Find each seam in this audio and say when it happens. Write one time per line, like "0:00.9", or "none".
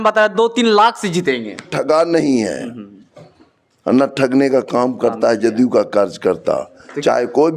0:01.7